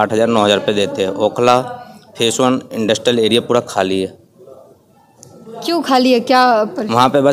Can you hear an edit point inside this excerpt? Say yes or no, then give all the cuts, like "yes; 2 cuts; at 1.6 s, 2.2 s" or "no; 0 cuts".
no; 0 cuts